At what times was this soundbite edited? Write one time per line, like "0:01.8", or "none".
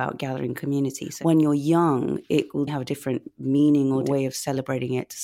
0:01.1
0:02.7
0:04.0